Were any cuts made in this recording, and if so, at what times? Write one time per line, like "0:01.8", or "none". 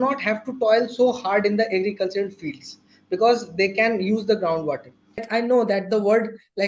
0:05.3